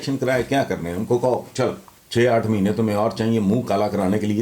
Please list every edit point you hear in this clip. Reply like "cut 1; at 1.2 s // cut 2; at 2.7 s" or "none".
cut 1; at 1.9 s